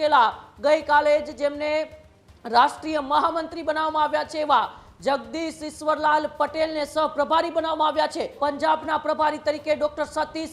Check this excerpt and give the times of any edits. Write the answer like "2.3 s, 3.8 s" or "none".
8.4 s